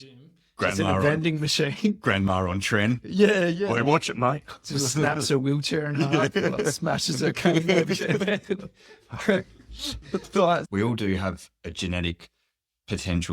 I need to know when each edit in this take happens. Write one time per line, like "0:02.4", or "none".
0:10.7